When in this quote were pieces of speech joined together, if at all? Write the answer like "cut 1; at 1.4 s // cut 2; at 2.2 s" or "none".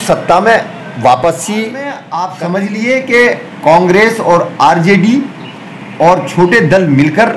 cut 1; at 2.0 s